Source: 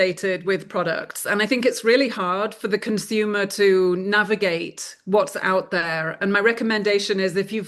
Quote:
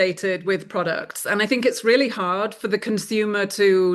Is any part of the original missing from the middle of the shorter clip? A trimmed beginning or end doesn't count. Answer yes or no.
no